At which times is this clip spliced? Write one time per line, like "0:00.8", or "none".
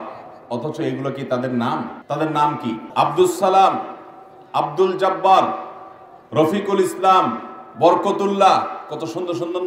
0:02.0
0:02.9